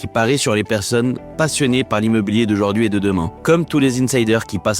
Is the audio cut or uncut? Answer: cut